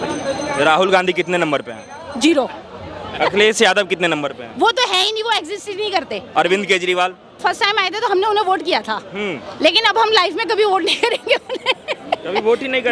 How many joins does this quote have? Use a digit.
3